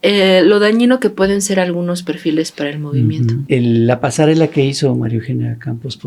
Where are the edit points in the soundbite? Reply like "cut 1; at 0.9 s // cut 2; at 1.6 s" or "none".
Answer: cut 1; at 3.4 s